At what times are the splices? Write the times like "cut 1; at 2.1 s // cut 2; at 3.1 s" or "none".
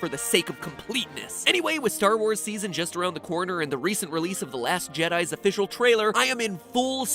cut 1; at 3.2 s